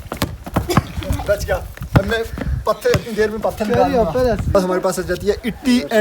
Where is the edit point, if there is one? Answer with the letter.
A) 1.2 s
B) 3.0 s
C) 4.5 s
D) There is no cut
C